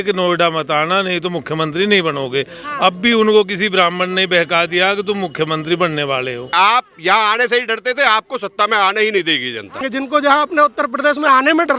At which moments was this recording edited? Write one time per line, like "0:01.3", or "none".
0:06.5
0:09.8